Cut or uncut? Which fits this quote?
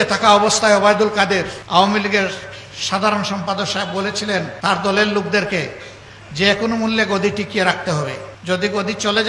cut